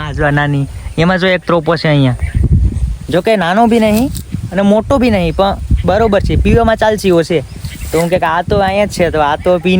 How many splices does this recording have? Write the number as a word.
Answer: zero